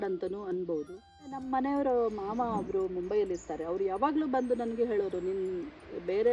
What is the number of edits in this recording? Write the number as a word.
one